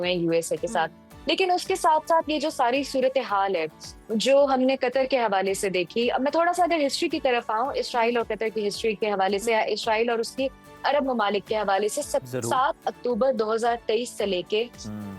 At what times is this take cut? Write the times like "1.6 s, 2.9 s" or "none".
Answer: none